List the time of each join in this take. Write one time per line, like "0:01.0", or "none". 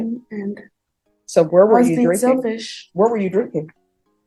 none